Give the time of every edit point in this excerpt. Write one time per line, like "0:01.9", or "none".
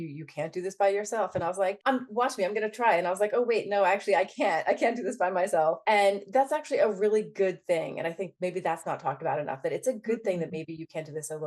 0:01.8
0:05.8